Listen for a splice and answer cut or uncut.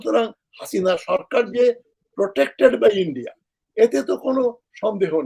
uncut